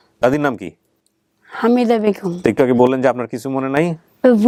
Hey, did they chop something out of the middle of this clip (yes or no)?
no